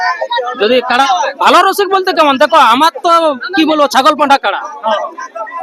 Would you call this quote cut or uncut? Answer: cut